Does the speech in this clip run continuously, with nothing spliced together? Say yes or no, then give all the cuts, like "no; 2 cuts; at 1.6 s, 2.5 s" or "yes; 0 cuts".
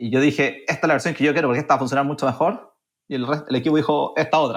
yes; 0 cuts